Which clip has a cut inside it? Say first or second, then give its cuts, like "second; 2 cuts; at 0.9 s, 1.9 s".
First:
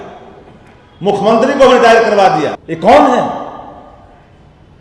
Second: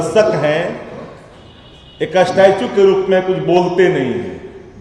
first; 1 cut; at 2.6 s